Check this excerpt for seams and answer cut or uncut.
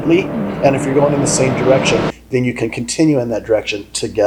uncut